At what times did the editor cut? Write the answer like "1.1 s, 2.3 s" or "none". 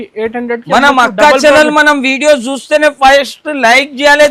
none